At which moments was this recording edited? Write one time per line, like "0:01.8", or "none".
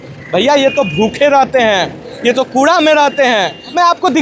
none

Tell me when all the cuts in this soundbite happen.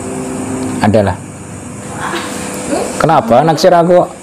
0:01.9

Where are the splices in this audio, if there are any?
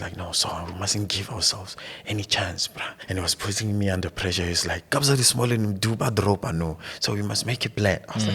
0:03.0

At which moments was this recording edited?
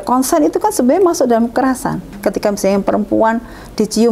0:02.1

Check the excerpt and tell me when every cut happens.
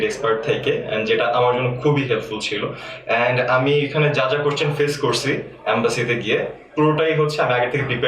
none

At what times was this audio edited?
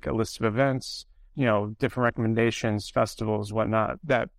0:01.2

